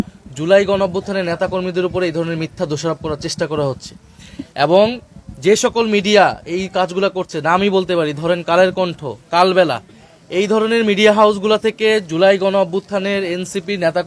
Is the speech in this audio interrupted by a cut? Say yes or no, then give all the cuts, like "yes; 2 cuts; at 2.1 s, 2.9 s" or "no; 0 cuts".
no; 0 cuts